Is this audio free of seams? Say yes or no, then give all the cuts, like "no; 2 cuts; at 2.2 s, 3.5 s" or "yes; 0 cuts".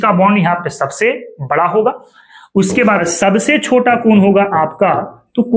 no; 1 cut; at 3.0 s